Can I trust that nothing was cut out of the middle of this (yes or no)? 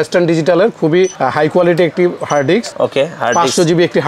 no